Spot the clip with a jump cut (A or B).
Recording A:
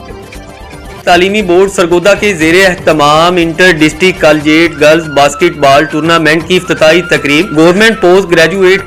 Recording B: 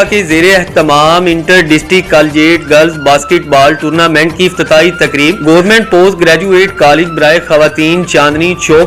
A